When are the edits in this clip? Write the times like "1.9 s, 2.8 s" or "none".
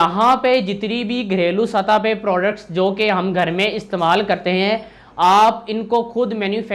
none